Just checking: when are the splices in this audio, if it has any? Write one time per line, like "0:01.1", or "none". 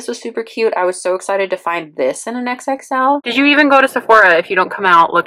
0:03.3